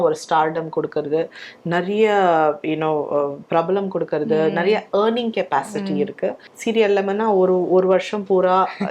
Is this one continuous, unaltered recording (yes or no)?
no